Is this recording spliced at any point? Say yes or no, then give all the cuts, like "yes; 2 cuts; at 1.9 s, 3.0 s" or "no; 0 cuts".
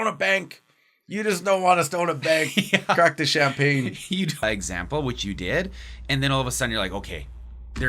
yes; 1 cut; at 4.4 s